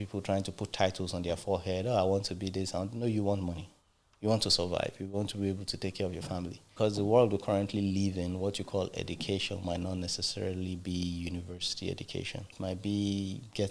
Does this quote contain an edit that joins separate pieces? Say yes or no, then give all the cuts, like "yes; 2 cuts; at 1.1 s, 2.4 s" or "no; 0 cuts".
yes; 2 cuts; at 6.6 s, 12.5 s